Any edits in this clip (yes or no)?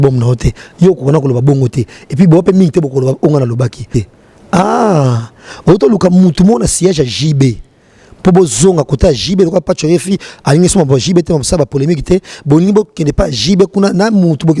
yes